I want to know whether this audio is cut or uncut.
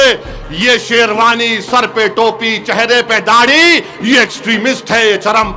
uncut